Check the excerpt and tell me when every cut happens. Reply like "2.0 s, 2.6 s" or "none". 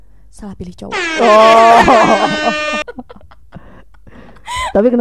none